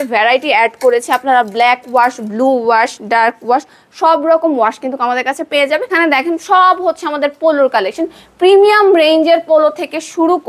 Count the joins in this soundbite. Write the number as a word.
one